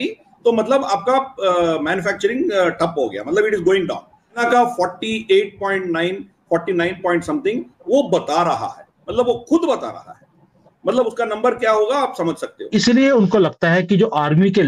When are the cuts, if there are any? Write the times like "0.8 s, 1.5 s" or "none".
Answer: 4.4 s, 12.7 s